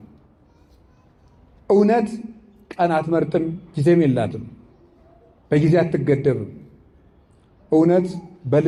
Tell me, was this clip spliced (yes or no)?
no